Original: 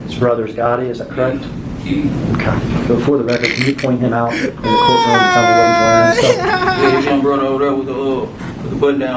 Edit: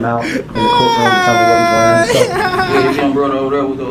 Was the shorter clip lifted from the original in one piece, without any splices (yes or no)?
yes